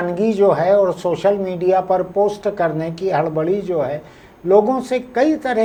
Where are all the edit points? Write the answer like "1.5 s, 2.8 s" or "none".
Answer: none